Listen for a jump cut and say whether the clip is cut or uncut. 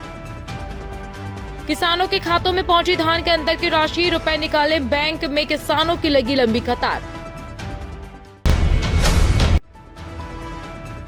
uncut